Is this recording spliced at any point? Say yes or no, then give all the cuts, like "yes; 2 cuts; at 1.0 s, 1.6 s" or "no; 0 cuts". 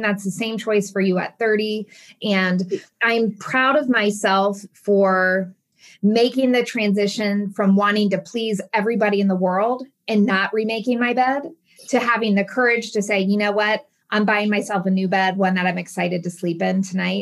yes; 1 cut; at 2.0 s